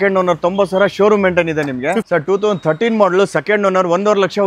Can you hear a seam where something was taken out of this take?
yes; 1 cut; at 2.0 s

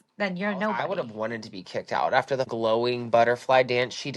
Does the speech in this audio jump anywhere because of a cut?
yes; 2 cuts; at 0.9 s, 2.5 s

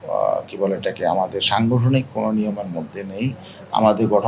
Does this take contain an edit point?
no; 0 cuts

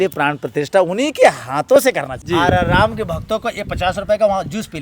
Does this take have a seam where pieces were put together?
yes; 1 cut; at 2.2 s

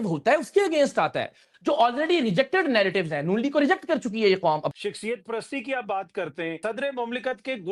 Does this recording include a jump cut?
yes; 2 cuts; at 4.7 s, 6.6 s

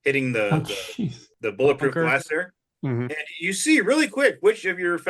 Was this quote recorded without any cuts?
no; 1 cut; at 1.2 s

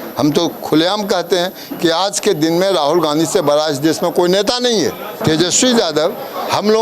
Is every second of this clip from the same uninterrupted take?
no; 1 cut; at 5.1 s

